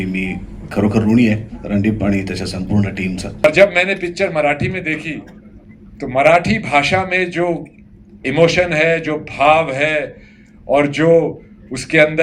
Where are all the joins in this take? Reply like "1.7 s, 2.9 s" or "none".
3.4 s

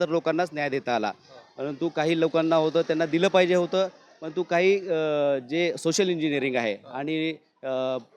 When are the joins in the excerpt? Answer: none

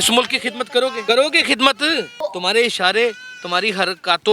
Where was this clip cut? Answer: 1.0 s, 2.1 s

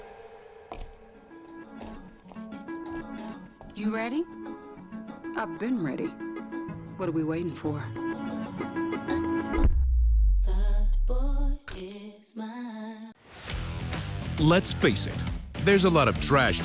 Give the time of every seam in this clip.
13.3 s

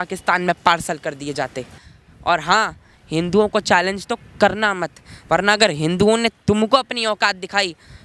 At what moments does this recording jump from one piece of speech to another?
1.8 s

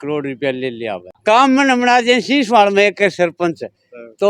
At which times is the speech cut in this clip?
1.1 s

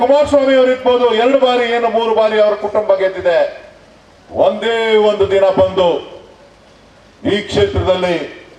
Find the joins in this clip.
none

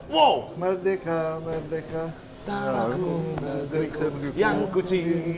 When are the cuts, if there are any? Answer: none

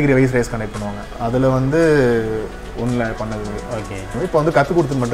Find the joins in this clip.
4.1 s

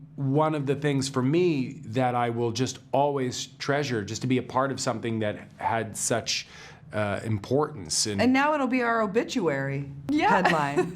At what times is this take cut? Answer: 9.9 s

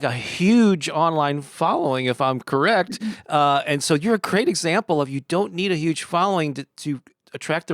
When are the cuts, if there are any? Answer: none

